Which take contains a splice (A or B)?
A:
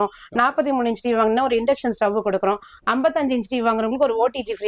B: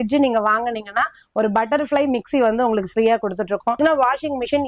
B